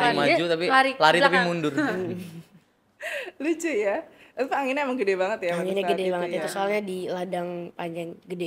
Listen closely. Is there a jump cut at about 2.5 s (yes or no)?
no